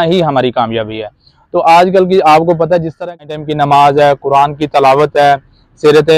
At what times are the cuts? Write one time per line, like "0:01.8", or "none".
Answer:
0:03.2